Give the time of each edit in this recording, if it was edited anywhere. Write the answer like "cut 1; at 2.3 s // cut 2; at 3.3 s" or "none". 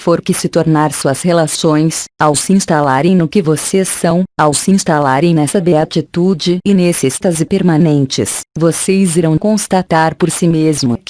cut 1; at 0.9 s